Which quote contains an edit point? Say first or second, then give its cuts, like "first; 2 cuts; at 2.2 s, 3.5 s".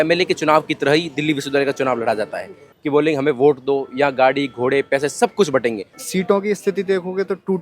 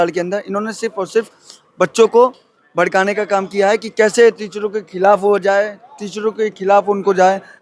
first; 2 cuts; at 2.7 s, 5.9 s